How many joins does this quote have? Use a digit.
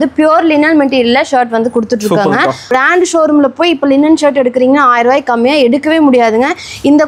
1